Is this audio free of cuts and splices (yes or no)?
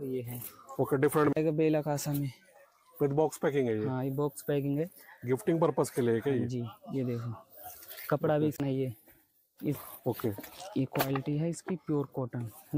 no